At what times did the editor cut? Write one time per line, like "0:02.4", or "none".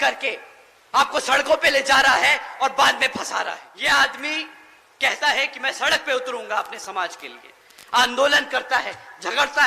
0:03.7